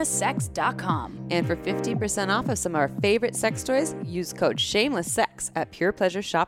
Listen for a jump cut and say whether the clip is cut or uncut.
uncut